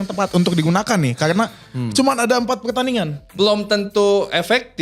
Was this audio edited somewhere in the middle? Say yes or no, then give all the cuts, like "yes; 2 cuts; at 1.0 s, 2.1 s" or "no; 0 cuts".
yes; 1 cut; at 3.2 s